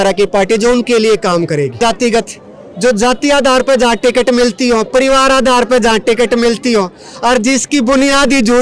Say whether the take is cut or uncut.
cut